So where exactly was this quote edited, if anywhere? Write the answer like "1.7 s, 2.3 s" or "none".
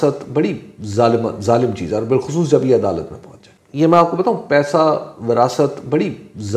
none